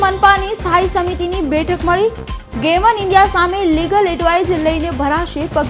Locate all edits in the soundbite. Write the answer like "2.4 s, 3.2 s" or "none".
none

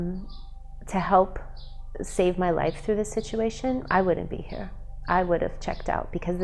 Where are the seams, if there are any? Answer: none

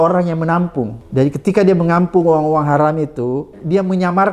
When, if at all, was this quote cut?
1.0 s, 3.5 s

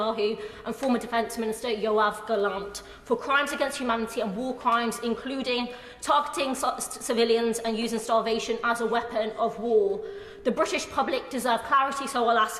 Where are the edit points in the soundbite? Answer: none

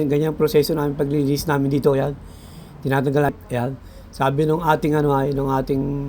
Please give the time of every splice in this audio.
3.3 s

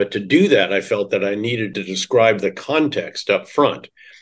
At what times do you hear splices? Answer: 1.7 s

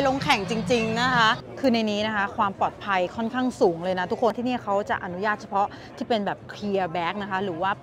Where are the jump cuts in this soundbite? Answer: 1.5 s, 4.4 s

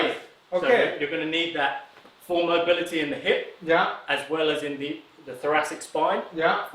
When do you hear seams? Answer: none

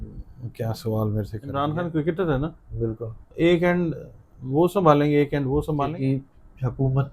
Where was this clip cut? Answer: 1.4 s, 5.9 s

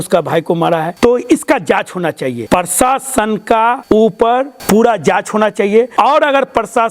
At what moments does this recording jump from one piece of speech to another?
0.9 s, 2.4 s, 3.8 s, 4.6 s, 5.9 s

